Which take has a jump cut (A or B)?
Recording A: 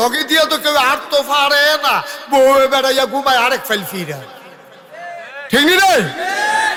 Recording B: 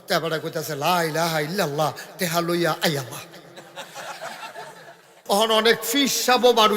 B